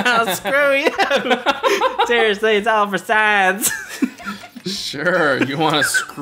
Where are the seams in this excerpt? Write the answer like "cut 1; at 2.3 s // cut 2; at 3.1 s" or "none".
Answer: none

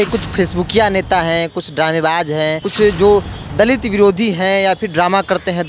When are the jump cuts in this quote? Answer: cut 1; at 2.6 s

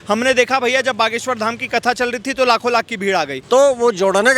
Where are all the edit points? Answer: cut 1; at 3.4 s

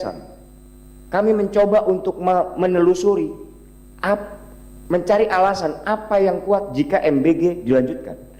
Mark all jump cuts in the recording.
none

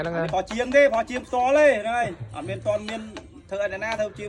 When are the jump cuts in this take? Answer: none

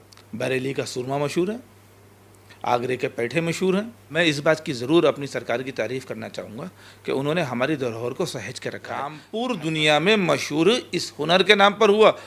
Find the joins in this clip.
cut 1; at 4.0 s // cut 2; at 9.1 s

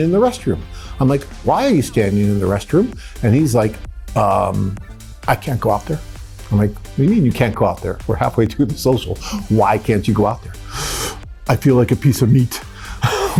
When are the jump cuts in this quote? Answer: none

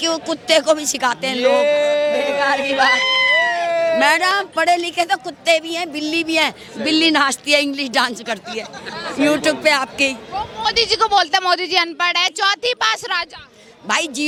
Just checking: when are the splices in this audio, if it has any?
none

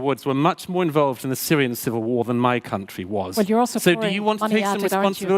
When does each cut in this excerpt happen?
cut 1; at 3.4 s

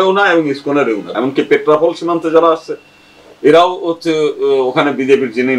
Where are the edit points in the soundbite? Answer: cut 1; at 1.1 s

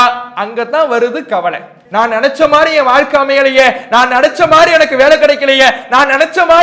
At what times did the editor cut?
cut 1; at 1.8 s

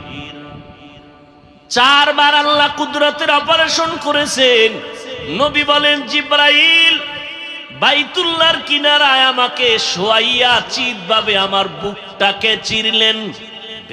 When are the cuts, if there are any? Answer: cut 1; at 1.2 s

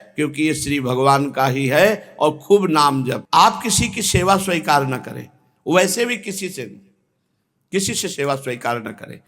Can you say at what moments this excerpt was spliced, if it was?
cut 1; at 3.2 s

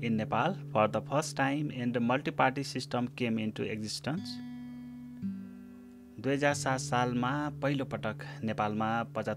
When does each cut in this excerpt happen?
cut 1; at 4.3 s // cut 2; at 6.0 s

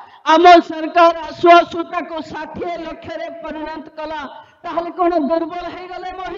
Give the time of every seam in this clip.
none

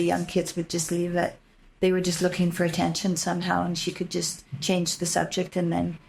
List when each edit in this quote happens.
none

